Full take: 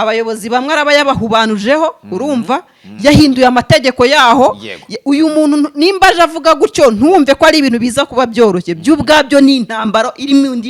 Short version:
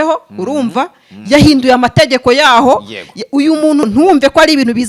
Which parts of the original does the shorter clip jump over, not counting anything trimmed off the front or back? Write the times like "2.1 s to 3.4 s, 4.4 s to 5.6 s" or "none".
5.6 s to 6.9 s